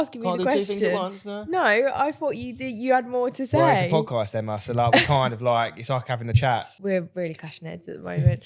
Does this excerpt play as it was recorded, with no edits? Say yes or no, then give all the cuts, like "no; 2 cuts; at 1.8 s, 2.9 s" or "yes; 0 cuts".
no; 1 cut; at 6.7 s